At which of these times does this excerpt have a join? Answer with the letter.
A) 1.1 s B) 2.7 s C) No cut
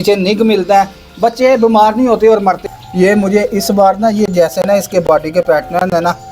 B